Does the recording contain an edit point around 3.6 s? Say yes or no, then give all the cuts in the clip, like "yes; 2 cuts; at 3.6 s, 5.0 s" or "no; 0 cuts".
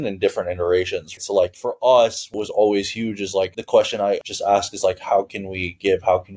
no; 2 cuts; at 1.2 s, 2.3 s